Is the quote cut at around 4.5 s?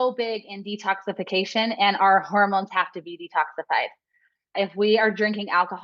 yes; 1 cut; at 4.5 s

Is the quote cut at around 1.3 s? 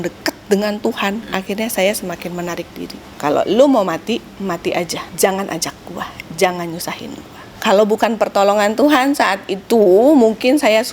yes; 4 cuts; at 1.3 s, 3.1 s, 5.0 s, 7.5 s

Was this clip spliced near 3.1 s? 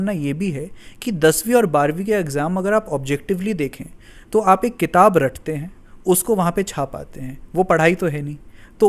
no; 0 cuts

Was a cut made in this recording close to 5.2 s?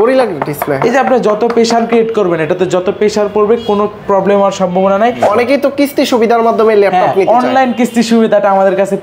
yes; 1 cut; at 5.2 s

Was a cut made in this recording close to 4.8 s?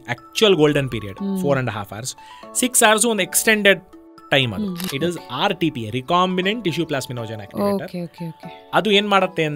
yes; 1 cut; at 4.8 s

